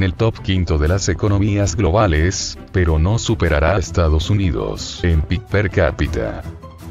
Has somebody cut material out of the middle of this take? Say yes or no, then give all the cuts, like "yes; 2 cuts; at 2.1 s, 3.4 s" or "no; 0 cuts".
no; 0 cuts